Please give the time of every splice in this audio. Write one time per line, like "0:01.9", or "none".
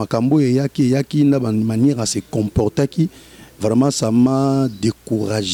none